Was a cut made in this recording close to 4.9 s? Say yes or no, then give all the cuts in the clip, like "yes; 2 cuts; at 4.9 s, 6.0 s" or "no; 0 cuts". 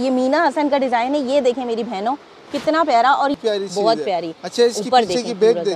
no; 1 cut; at 3.4 s